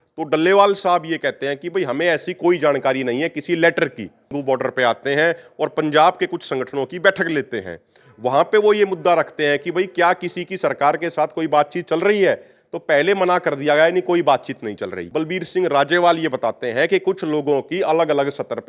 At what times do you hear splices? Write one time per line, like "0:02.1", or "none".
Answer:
0:04.3
0:15.0